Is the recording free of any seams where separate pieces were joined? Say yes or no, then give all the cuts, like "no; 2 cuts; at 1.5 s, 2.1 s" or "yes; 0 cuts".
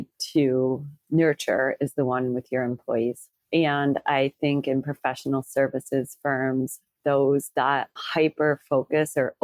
no; 2 cuts; at 0.9 s, 8.0 s